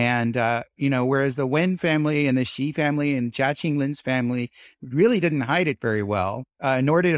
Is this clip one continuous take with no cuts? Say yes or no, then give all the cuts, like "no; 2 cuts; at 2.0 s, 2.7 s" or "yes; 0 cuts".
yes; 0 cuts